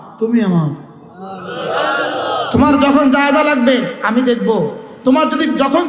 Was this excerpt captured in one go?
yes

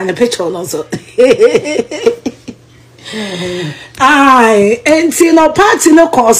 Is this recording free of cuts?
yes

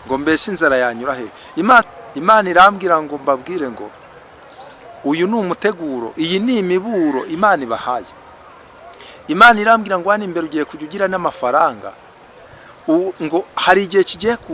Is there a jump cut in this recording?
yes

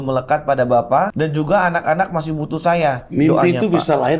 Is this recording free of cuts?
no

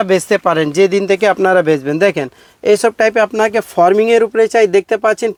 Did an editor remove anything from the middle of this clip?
no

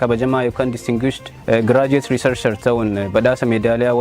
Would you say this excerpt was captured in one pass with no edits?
yes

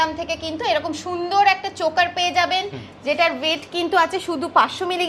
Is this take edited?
no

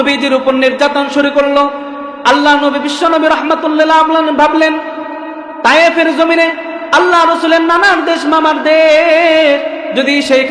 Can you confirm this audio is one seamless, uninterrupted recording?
yes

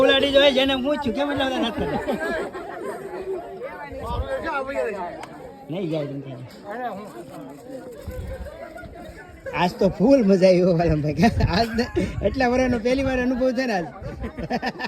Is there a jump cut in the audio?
no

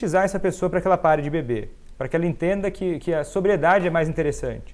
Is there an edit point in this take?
no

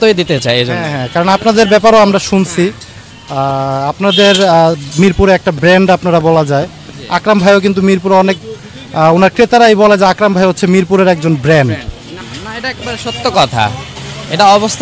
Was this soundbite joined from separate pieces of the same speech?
no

